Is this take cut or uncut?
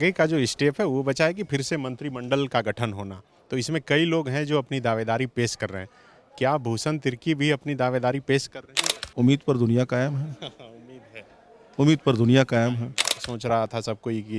cut